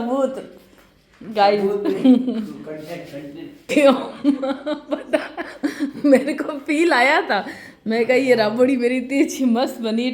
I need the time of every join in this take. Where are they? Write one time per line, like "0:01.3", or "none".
0:03.6